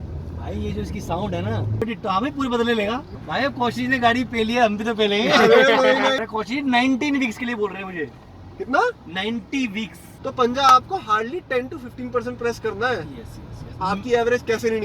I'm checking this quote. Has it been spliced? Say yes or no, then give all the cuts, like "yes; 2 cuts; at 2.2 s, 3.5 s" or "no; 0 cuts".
yes; 4 cuts; at 1.8 s, 3.1 s, 6.2 s, 10.1 s